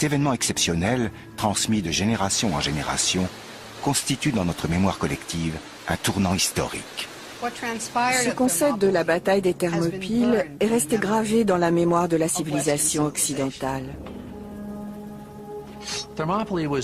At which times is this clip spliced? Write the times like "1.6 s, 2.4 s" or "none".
1.8 s